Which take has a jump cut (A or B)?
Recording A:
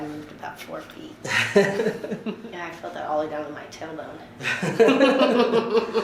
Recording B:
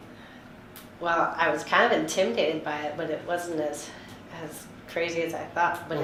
A